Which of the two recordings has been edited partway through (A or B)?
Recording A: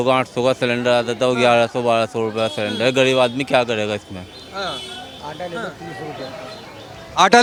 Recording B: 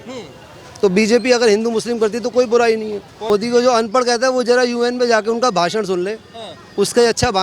B